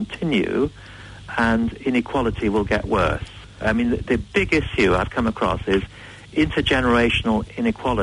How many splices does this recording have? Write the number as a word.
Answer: one